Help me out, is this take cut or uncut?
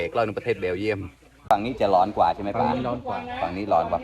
cut